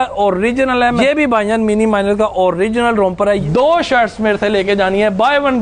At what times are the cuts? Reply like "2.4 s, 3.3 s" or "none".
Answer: 1.0 s, 3.4 s